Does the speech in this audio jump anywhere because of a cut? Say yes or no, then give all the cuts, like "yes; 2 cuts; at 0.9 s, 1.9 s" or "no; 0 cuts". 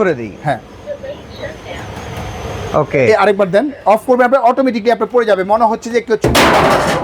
no; 0 cuts